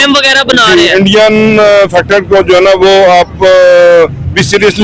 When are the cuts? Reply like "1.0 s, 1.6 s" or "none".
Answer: none